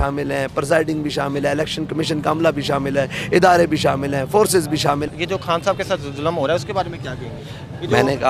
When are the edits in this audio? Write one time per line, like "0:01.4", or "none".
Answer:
0:05.1